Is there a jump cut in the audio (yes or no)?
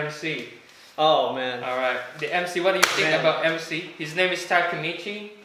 no